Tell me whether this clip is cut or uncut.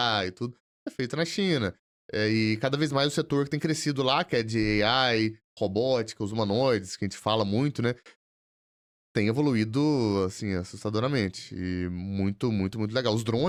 uncut